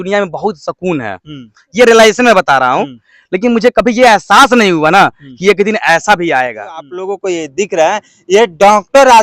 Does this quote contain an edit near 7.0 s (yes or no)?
yes